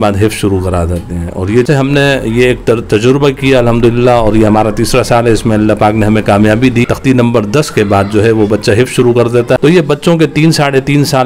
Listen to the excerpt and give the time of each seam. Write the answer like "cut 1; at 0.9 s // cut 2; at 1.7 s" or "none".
cut 1; at 1.7 s // cut 2; at 6.9 s // cut 3; at 9.4 s